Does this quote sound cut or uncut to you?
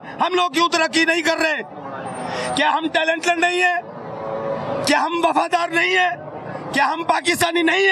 uncut